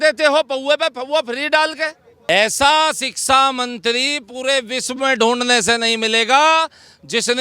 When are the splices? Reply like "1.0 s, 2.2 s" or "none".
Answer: 2.1 s